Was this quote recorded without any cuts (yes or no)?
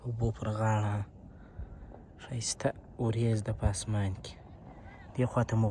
yes